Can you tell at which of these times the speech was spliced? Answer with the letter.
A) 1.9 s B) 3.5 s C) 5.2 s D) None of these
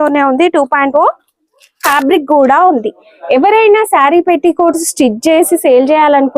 A